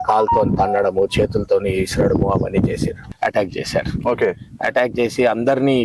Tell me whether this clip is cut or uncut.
cut